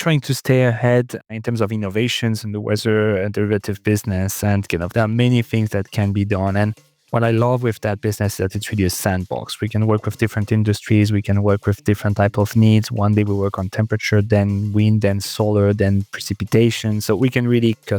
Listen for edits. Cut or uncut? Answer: cut